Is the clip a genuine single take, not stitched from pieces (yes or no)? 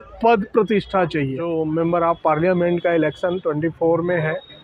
no